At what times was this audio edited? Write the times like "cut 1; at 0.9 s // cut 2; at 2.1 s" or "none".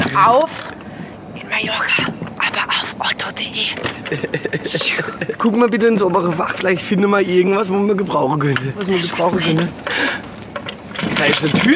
cut 1; at 5.4 s // cut 2; at 8.8 s // cut 3; at 10.9 s